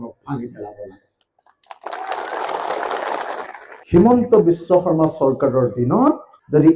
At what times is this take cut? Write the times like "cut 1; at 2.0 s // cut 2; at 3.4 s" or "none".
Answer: cut 1; at 3.7 s